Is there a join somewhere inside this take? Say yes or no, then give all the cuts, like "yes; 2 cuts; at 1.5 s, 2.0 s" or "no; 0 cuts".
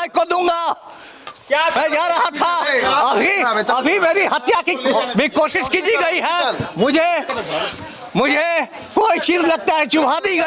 yes; 1 cut; at 1.8 s